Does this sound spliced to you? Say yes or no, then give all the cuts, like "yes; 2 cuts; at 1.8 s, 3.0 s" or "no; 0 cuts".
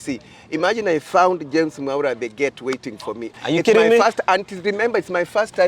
yes; 1 cut; at 3.3 s